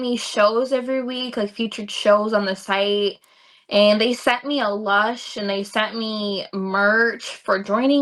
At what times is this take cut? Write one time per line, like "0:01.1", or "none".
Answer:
none